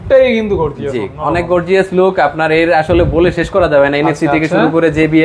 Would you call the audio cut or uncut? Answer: uncut